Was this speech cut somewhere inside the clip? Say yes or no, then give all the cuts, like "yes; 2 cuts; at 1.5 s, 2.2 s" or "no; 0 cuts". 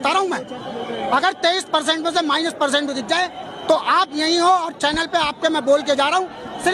no; 0 cuts